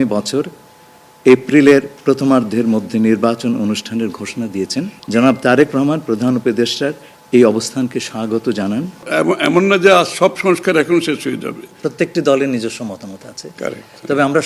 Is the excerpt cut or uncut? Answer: cut